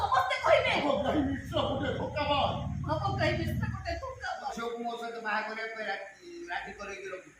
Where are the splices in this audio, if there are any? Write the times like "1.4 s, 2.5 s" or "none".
4.5 s